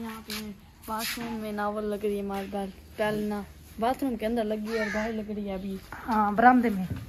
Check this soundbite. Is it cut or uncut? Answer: uncut